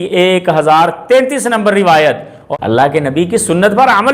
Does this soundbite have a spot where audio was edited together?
yes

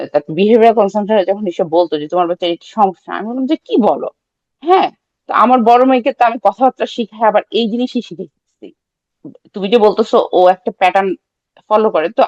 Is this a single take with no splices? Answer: yes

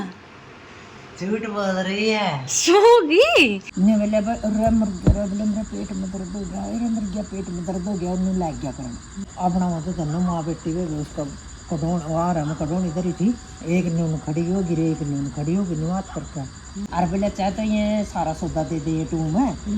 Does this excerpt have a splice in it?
yes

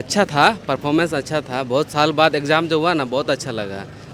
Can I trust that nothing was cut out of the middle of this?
yes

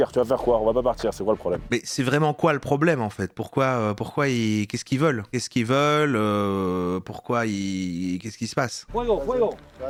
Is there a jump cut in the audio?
no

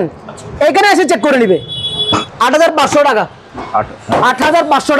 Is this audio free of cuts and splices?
no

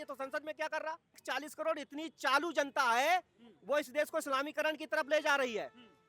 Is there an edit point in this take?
yes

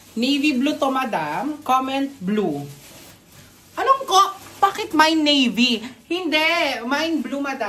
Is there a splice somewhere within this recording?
no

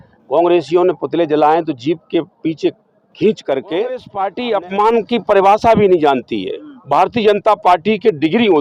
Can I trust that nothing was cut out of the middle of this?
no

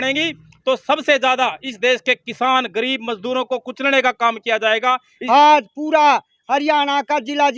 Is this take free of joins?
no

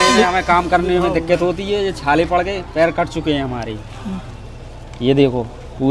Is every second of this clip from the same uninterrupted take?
yes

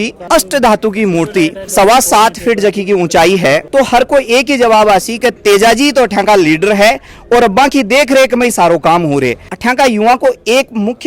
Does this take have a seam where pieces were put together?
yes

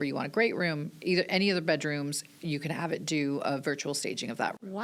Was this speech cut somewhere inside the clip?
no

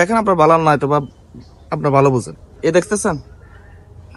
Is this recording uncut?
no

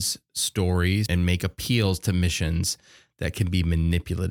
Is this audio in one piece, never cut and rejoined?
no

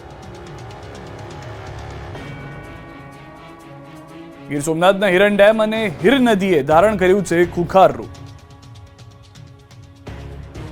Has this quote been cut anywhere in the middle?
yes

